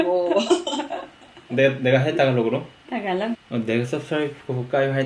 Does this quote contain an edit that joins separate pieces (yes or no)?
yes